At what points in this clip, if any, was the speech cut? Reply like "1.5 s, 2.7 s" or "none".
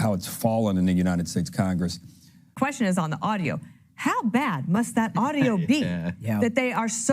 2.5 s